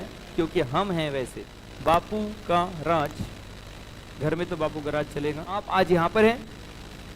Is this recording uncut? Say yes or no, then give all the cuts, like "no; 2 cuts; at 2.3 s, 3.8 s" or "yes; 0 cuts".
no; 2 cuts; at 1.7 s, 5.5 s